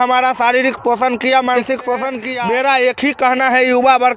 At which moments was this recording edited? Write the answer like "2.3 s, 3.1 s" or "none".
2.2 s